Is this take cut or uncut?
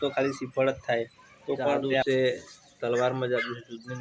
cut